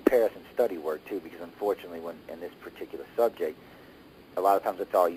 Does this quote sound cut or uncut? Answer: uncut